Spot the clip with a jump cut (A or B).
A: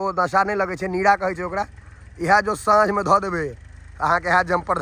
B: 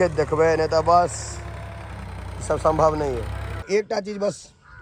B